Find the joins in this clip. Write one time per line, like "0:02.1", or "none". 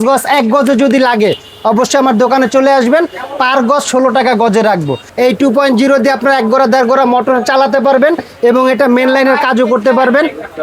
0:05.0